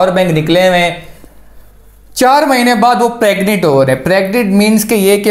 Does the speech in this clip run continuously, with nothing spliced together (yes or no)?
yes